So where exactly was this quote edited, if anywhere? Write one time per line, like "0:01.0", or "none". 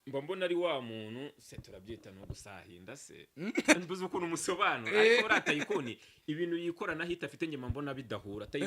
0:03.8